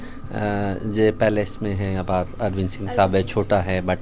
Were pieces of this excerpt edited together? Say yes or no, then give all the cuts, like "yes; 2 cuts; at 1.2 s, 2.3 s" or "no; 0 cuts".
no; 0 cuts